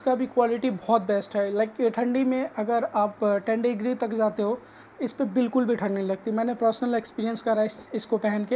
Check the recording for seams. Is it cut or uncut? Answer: uncut